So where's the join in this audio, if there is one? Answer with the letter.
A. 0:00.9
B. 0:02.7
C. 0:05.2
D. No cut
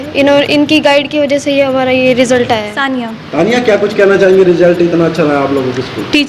D